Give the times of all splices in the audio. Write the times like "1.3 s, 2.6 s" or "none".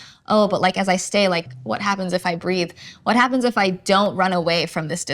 1.5 s